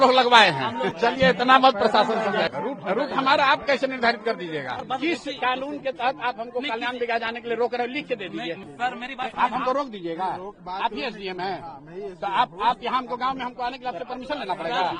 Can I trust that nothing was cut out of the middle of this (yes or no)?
no